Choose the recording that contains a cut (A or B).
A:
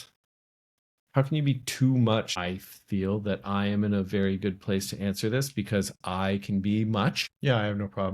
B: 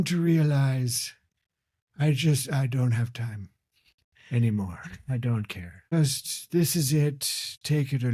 A